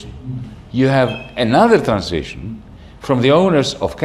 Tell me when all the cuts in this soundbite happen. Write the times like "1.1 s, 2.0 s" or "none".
none